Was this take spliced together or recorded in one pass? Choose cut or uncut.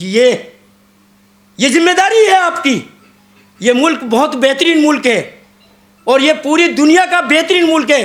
uncut